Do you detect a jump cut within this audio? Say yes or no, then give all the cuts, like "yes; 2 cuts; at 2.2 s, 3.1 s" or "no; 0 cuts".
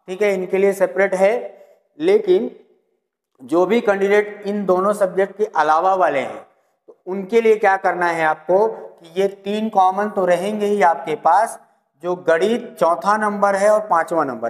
no; 0 cuts